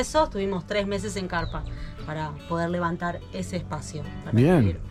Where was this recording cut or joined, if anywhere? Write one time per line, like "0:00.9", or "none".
none